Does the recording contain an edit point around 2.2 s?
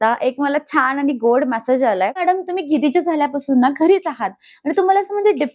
yes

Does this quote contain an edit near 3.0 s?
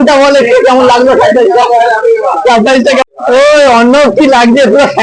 yes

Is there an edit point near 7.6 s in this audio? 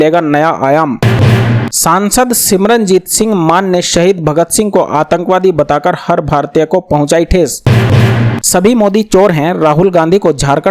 yes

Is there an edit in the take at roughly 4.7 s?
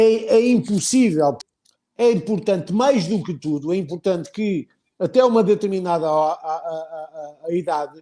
no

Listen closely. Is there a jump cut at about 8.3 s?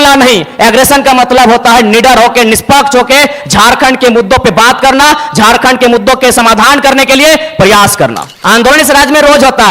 yes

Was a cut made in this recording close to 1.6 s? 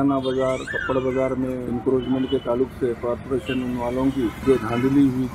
yes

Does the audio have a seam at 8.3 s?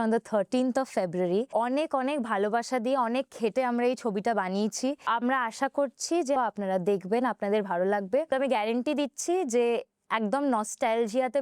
yes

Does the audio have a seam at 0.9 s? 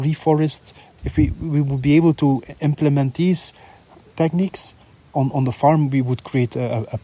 yes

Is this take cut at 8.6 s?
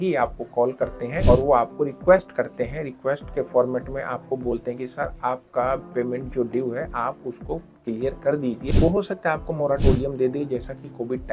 yes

